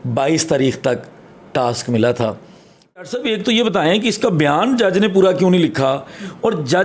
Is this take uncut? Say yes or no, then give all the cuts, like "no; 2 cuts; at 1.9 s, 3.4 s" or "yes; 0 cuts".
no; 1 cut; at 3.1 s